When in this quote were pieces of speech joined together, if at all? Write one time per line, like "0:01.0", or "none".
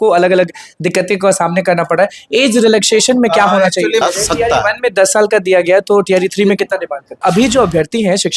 0:04.0
0:07.2